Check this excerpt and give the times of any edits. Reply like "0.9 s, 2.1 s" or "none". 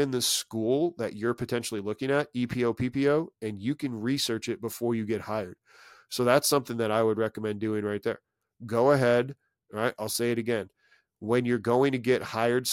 none